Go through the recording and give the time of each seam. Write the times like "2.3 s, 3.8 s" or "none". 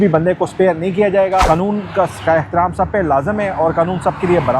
1.4 s